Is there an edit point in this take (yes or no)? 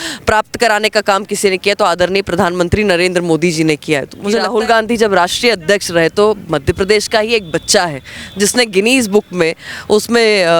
yes